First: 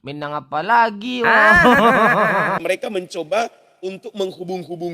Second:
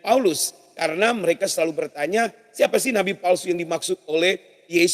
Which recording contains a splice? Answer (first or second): first